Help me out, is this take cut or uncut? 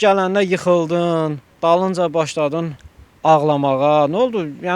cut